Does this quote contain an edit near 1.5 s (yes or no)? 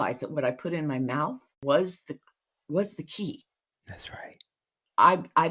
yes